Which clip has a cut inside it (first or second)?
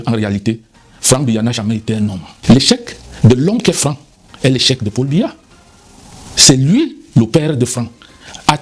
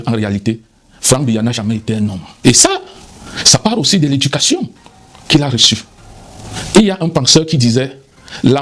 first